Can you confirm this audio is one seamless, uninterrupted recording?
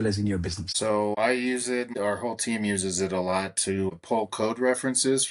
no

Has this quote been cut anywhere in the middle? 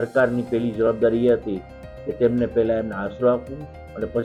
no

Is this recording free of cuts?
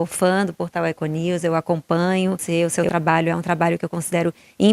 no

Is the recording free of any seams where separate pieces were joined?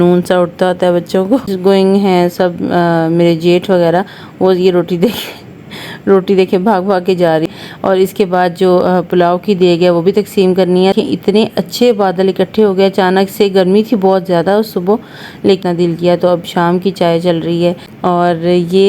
no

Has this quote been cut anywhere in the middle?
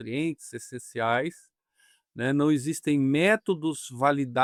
no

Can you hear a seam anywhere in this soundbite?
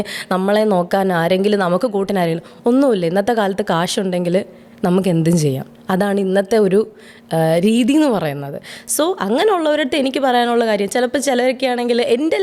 no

